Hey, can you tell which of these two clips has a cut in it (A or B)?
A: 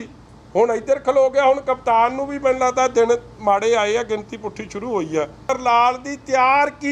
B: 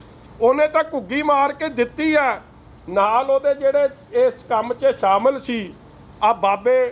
A